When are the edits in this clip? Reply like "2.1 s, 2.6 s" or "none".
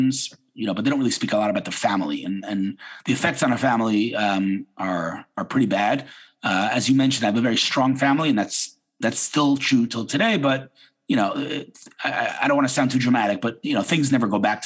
none